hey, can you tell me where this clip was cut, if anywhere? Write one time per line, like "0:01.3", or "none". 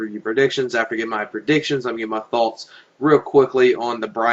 none